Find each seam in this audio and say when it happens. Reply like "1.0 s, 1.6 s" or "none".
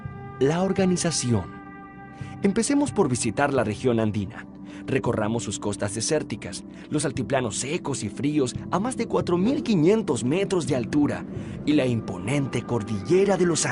none